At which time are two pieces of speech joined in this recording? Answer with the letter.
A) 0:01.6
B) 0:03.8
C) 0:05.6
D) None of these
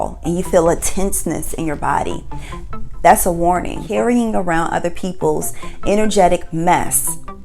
B